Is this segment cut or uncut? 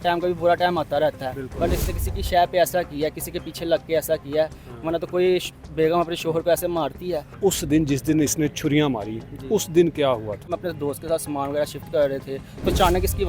cut